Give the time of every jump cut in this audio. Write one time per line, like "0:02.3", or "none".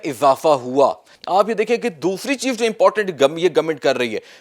0:01.2